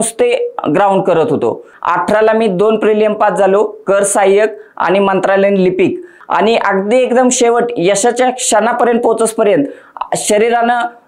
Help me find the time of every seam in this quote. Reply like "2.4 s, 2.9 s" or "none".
1.7 s, 6.2 s

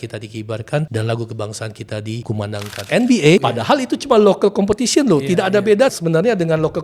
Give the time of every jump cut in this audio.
0.9 s, 2.5 s, 3.4 s, 6.0 s

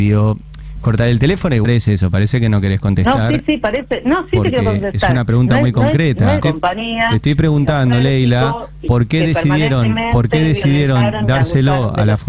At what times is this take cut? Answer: 1.7 s, 6.4 s

